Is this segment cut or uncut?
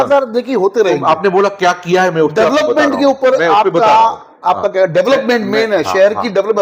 uncut